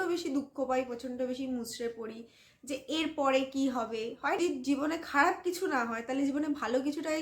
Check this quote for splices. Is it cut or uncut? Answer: cut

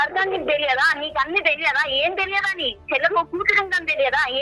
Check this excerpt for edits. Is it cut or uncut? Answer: uncut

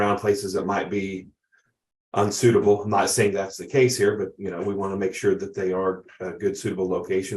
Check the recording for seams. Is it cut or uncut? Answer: uncut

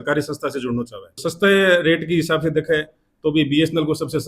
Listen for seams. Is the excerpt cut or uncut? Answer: cut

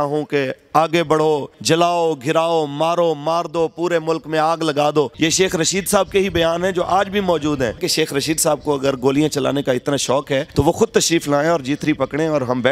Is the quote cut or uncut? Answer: cut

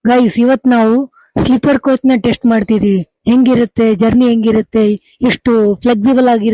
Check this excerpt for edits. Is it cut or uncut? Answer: uncut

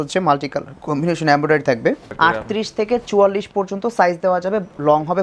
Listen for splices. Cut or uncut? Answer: cut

